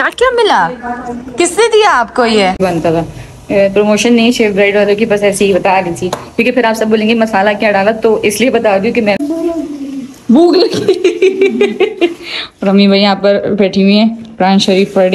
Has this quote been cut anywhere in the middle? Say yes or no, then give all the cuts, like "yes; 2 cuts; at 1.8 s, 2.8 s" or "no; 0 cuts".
yes; 2 cuts; at 2.6 s, 9.2 s